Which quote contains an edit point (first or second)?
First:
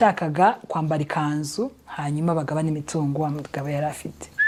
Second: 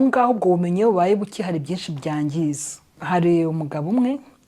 second